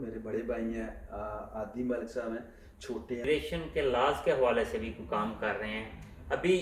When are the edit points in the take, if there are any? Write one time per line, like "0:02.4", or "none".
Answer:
0:03.2